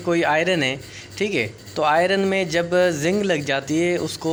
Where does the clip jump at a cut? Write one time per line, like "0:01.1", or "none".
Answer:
none

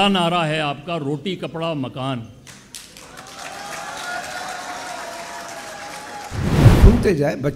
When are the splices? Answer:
0:06.7

